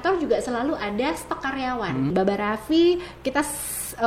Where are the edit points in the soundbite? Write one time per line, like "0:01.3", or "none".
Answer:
0:02.1